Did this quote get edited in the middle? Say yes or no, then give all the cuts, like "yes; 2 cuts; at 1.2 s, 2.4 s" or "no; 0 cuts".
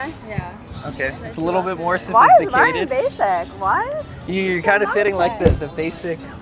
yes; 1 cut; at 4.1 s